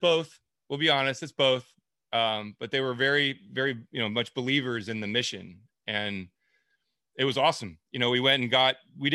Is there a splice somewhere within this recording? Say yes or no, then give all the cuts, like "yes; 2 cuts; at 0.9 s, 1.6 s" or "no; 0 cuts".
no; 0 cuts